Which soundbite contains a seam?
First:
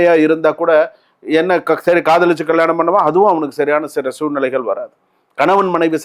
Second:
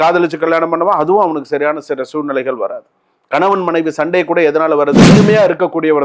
second; 1 cut; at 5.1 s

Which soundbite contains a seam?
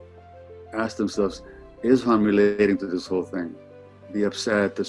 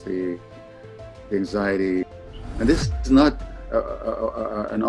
second; 1 cut; at 2.1 s

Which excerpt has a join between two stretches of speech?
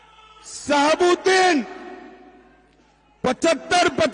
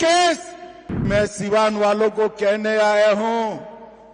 second; 1 cut; at 1.0 s

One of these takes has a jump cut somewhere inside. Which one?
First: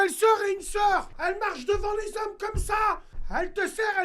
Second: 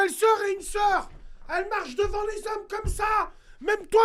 first; 2 cuts; at 1.1 s, 3.2 s

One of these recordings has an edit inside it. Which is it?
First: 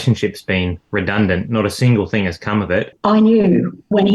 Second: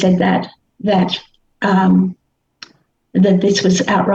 first; 1 cut; at 2.9 s

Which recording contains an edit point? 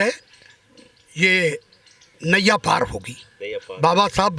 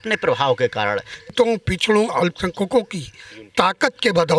second; 1 cut; at 1.3 s

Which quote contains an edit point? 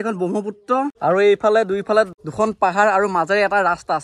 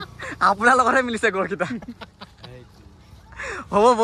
first; 2 cuts; at 0.9 s, 2.2 s

